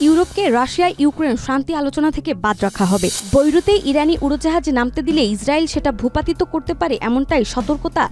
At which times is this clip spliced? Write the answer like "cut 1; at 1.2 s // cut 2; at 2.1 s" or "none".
cut 1; at 3.2 s